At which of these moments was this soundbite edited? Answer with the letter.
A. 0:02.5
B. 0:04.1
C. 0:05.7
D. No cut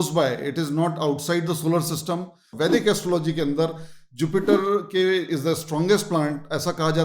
A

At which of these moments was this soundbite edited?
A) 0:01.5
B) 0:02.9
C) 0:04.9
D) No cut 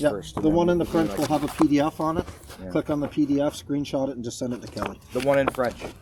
D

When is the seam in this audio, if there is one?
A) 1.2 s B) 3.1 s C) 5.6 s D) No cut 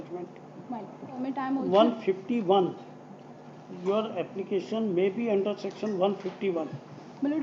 A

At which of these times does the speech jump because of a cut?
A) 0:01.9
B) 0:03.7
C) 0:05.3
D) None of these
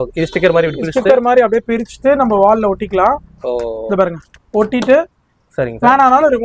D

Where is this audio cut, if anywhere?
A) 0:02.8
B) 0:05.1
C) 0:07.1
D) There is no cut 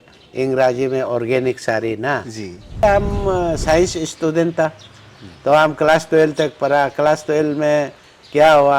A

